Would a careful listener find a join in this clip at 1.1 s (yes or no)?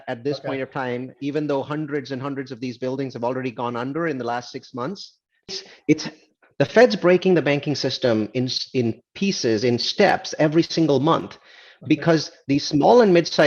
no